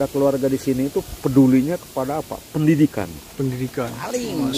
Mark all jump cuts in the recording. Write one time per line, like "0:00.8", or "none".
none